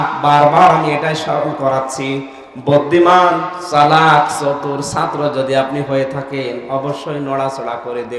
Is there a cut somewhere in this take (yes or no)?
no